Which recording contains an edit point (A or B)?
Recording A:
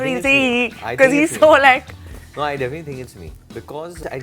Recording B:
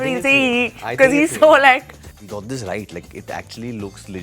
B